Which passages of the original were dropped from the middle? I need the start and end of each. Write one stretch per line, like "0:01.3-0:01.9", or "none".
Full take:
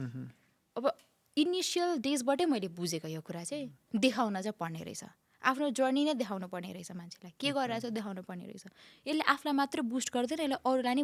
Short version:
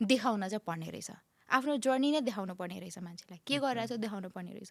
none